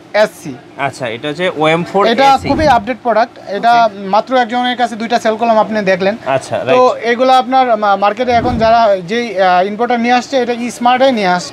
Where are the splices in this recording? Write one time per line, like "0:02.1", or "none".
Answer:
none